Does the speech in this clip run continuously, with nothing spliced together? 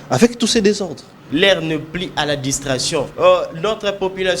no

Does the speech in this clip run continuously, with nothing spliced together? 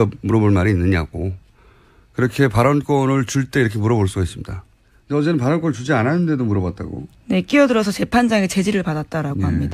no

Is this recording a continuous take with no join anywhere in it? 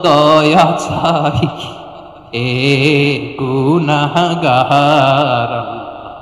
yes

